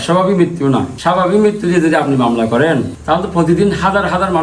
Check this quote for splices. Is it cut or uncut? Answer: cut